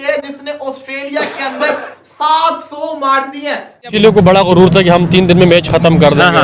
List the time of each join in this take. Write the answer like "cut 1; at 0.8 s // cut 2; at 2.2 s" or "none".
cut 1; at 3.9 s